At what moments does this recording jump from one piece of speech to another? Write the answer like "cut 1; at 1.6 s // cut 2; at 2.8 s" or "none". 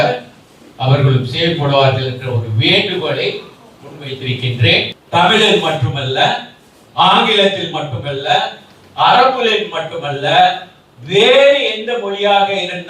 cut 1; at 5.0 s